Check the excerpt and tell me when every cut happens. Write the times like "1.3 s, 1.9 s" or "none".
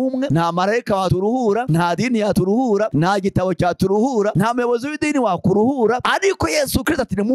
none